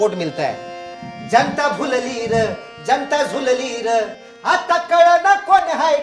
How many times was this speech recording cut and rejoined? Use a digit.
0